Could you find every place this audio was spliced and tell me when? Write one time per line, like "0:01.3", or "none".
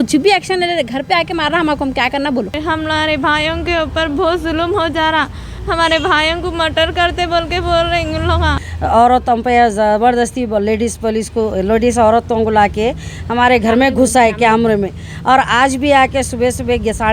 0:02.6
0:08.6